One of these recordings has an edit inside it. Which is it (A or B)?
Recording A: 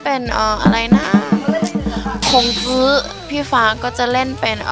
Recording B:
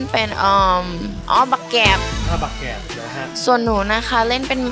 A